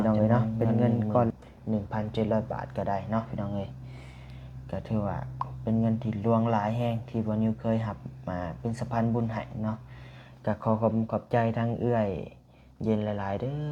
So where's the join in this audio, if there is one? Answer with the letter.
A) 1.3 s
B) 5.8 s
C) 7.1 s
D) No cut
A